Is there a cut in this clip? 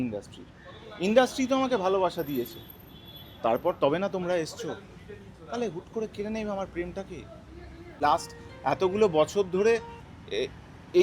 yes; 1 cut; at 7.9 s

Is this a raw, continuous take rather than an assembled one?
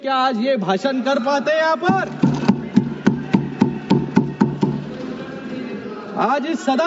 yes; 0 cuts

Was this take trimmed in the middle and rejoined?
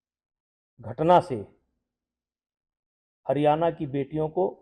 no; 0 cuts

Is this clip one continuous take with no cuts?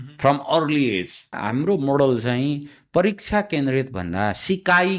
no; 1 cut; at 1.4 s

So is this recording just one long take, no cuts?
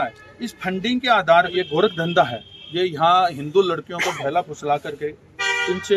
no; 1 cut; at 1.5 s

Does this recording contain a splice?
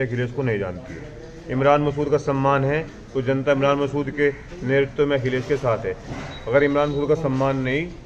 no; 0 cuts

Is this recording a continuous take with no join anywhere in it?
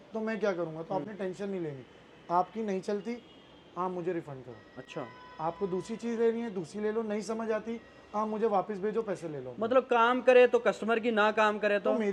yes; 0 cuts

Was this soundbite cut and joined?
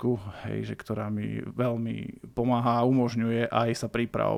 no; 0 cuts

